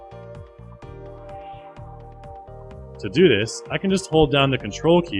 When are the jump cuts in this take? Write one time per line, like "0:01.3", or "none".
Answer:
0:03.4